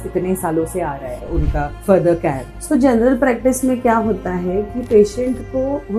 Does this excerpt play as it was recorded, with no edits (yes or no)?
yes